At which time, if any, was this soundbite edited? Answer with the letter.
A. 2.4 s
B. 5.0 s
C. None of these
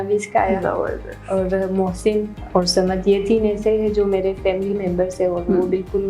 A